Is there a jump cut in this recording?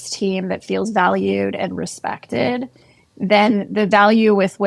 no; 0 cuts

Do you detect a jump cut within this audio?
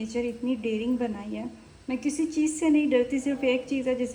no; 0 cuts

